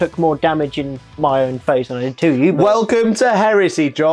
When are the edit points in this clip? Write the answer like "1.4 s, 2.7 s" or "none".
none